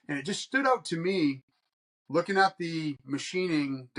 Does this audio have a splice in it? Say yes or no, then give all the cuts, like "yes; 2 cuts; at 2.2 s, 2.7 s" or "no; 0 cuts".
no; 0 cuts